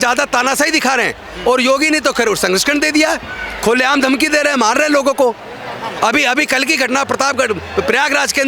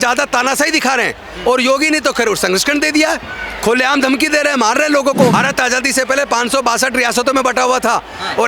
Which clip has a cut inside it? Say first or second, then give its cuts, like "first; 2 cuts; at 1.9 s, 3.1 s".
second; 1 cut; at 5.3 s